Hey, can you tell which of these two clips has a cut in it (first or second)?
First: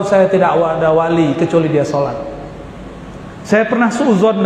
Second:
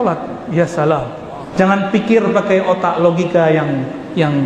second